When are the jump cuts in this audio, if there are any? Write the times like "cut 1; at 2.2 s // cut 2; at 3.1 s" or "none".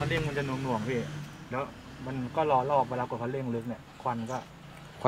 none